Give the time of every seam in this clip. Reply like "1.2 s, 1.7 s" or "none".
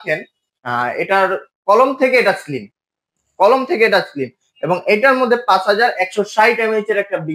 none